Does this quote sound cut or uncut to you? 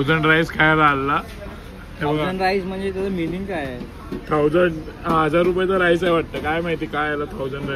uncut